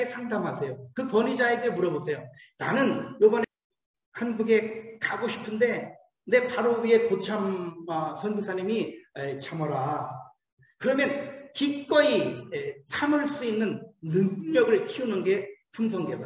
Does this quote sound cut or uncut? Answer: cut